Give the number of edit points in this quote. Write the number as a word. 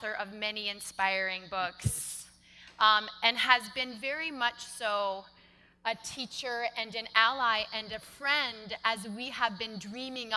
one